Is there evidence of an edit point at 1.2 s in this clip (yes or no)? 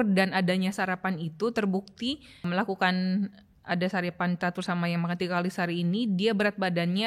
no